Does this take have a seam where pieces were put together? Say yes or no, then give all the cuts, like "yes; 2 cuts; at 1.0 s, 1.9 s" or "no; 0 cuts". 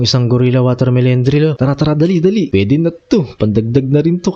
yes; 2 cuts; at 1.6 s, 2.5 s